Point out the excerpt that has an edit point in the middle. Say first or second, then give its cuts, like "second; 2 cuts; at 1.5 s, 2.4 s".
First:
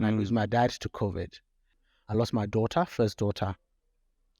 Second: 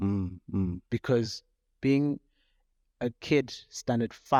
first; 1 cut; at 1.7 s